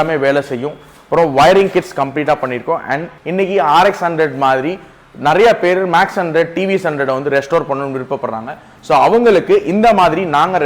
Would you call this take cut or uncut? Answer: cut